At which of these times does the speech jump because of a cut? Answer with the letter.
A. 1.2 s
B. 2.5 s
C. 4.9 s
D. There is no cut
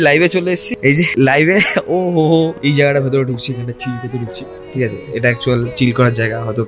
B